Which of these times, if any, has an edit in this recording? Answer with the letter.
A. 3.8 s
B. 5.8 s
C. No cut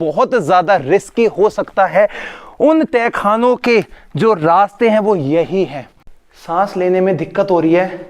B